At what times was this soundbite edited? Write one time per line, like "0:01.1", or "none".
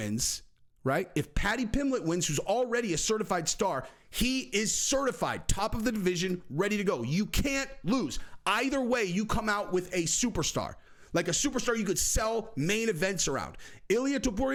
none